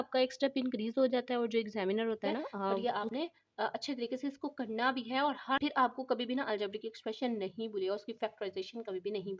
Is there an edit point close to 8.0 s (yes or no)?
no